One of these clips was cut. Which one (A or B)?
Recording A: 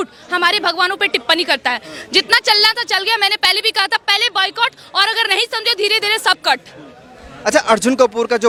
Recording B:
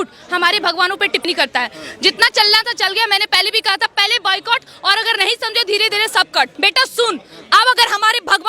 B